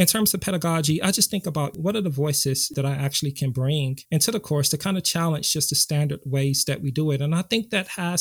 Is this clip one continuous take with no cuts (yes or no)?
yes